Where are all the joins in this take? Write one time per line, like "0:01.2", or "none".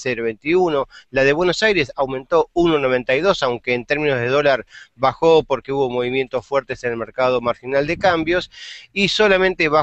0:05.5